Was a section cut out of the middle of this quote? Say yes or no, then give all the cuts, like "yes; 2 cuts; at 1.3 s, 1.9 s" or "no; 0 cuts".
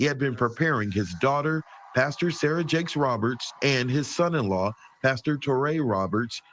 no; 0 cuts